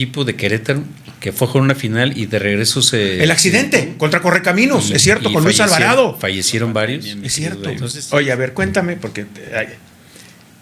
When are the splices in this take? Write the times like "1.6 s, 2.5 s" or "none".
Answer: 7.6 s

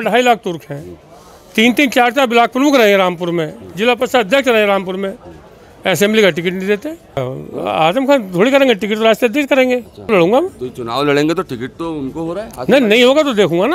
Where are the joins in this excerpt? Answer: 7.3 s, 10.1 s

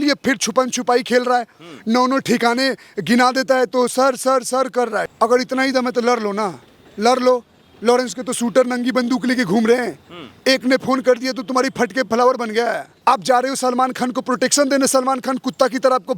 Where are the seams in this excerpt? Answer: 5.1 s, 12.9 s

